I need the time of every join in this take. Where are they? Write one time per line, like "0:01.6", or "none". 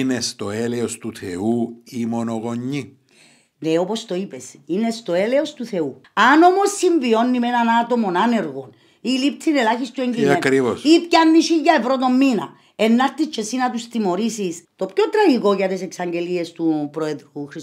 0:06.0
0:14.6